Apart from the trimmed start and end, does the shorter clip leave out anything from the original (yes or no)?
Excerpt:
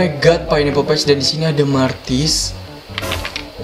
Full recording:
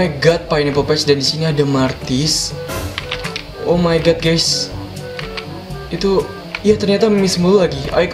no